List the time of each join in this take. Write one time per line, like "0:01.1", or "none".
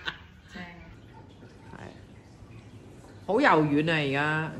0:01.0